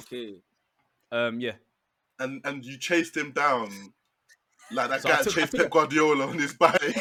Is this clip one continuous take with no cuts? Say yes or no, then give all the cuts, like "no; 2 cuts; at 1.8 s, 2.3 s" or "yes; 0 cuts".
yes; 0 cuts